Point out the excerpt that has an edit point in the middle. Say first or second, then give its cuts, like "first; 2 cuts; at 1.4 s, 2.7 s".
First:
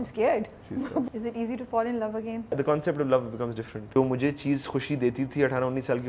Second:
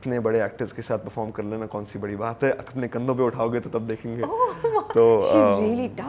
first; 3 cuts; at 1.1 s, 2.5 s, 3.9 s